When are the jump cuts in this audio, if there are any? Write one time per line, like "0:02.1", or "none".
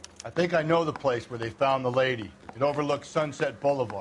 0:01.7